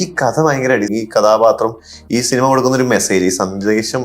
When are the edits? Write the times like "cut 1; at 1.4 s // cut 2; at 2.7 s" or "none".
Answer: cut 1; at 0.9 s